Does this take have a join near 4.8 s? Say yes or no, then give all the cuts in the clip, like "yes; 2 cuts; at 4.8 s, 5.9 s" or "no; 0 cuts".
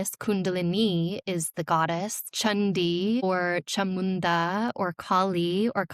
no; 2 cuts; at 2.2 s, 3.2 s